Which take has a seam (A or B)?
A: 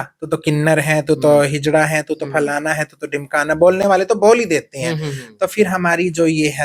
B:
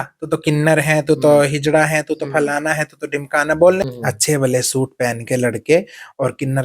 B